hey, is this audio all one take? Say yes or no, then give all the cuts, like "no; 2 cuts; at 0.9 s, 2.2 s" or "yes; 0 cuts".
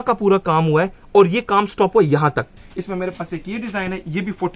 no; 1 cut; at 2.5 s